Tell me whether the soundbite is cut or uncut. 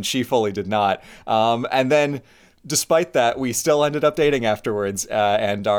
uncut